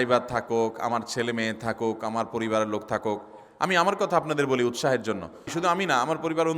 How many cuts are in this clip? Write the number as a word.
one